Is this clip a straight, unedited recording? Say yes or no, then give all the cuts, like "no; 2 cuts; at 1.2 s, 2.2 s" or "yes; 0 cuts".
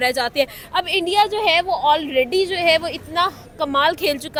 yes; 0 cuts